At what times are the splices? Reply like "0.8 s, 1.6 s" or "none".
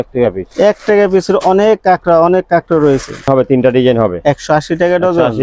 3.3 s

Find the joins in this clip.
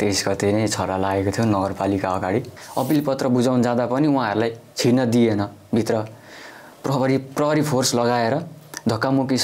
2.6 s

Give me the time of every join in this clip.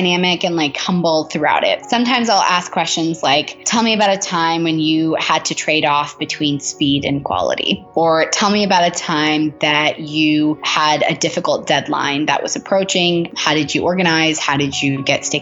1.8 s, 7.8 s

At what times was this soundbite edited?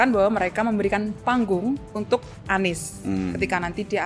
none

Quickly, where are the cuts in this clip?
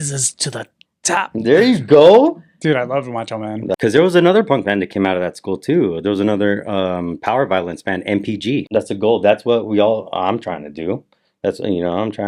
3.8 s, 8.7 s

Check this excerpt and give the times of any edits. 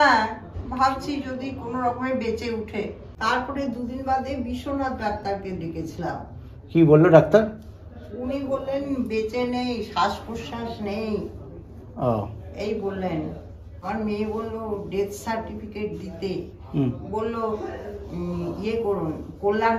3.1 s, 13.8 s

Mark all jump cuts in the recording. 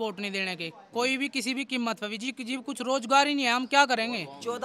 none

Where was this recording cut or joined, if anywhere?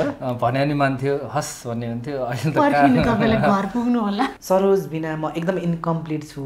4.3 s

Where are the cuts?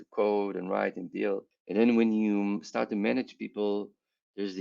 1.5 s

